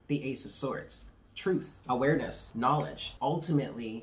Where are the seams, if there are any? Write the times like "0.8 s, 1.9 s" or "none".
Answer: 1.7 s, 3.0 s